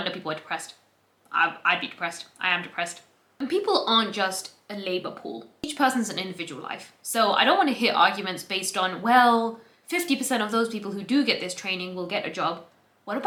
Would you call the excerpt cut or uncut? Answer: uncut